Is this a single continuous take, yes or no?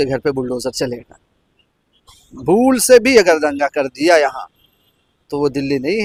yes